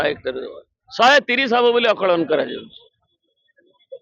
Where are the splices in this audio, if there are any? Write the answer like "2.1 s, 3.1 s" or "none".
none